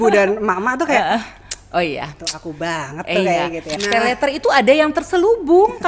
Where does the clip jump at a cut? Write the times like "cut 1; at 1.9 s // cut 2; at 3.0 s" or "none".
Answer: cut 1; at 3.7 s